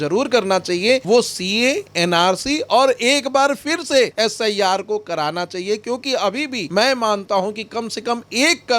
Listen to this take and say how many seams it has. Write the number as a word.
three